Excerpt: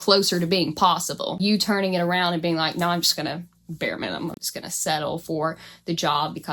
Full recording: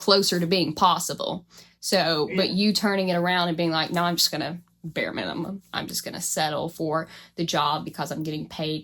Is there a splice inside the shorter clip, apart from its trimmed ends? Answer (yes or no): yes